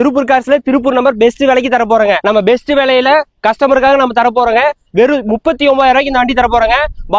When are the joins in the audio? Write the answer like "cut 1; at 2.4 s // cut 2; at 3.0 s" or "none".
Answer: cut 1; at 2.2 s